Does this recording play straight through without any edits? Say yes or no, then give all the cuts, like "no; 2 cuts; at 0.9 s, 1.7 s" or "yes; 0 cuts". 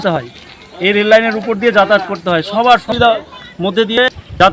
no; 1 cut; at 2.9 s